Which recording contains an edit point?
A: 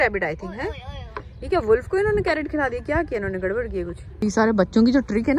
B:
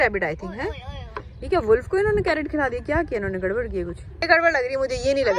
A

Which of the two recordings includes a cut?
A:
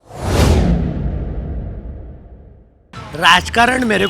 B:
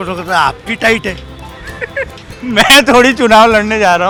A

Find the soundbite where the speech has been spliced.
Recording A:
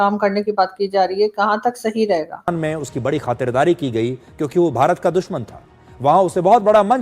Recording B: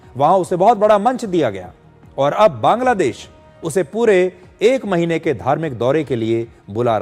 A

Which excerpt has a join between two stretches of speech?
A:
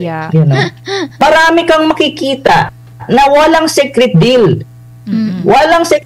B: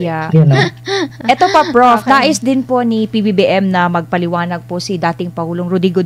A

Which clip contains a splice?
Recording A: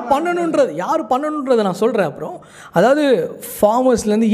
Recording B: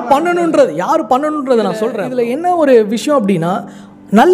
B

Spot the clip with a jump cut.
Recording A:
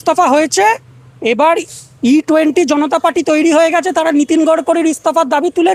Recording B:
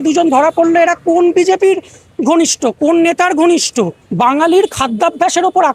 B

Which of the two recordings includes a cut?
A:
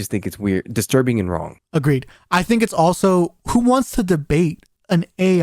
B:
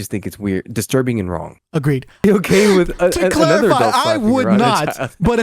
B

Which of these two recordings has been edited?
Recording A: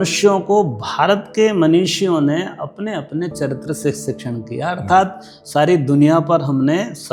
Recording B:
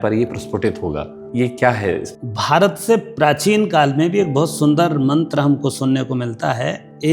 B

